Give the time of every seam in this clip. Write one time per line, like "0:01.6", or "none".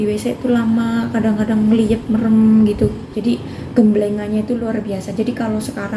0:03.1